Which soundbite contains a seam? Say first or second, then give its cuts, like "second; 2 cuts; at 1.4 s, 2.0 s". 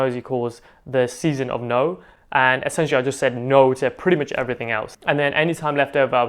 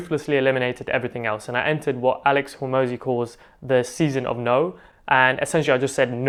first; 1 cut; at 5.0 s